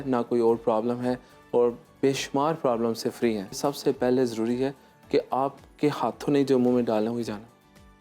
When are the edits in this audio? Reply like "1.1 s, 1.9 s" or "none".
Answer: 3.6 s